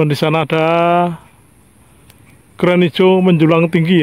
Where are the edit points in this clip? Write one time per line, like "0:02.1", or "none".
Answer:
none

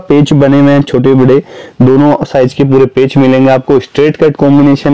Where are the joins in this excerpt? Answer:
none

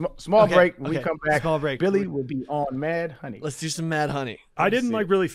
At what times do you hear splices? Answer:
0:04.4

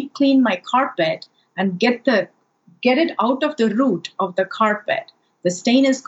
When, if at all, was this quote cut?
none

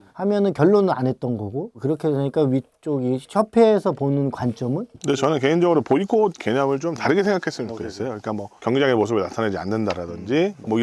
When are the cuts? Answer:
0:04.9

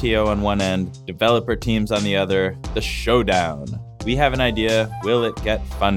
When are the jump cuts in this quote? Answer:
0:01.0

